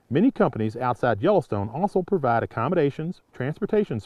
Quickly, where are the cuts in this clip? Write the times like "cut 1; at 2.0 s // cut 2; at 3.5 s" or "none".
none